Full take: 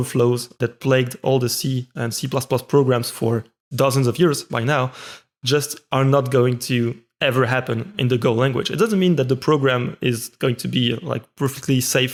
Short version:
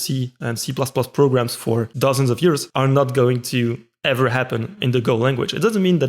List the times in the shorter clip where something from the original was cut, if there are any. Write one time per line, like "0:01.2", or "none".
0:01.9
0:02.7